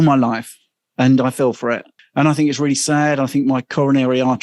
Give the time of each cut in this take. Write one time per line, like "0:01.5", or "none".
0:01.9